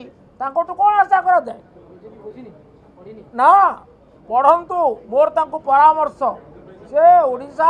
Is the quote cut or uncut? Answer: uncut